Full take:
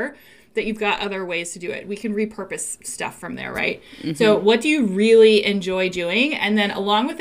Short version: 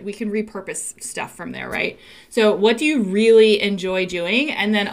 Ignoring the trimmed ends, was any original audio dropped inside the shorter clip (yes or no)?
no